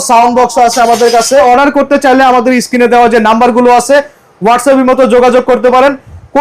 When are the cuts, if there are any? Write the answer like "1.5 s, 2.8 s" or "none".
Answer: 1.4 s